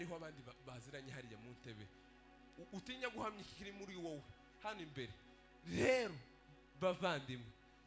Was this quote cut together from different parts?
no; 0 cuts

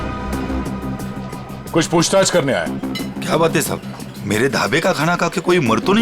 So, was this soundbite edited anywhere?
no; 0 cuts

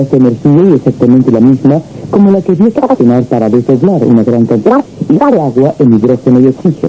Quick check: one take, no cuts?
yes; 0 cuts

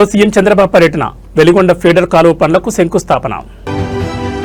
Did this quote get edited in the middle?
no; 0 cuts

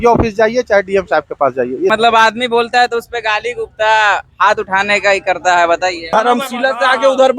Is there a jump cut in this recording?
yes; 2 cuts; at 1.9 s, 6.0 s

